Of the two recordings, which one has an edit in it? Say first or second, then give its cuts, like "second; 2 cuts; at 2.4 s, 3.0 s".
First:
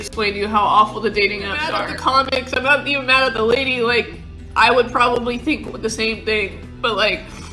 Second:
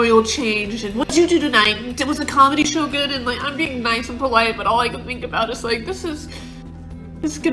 first; 1 cut; at 1.9 s